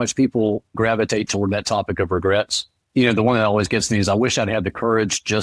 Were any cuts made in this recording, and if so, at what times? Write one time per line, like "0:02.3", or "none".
none